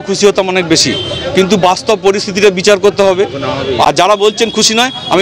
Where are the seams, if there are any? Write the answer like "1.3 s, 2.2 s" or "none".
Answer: 3.8 s